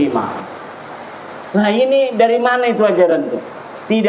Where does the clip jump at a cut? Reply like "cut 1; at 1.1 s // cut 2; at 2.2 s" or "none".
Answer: none